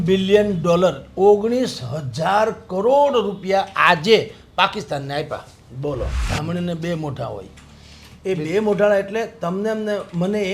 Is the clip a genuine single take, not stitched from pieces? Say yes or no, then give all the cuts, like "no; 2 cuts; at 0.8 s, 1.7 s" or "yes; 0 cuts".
no; 1 cut; at 6.2 s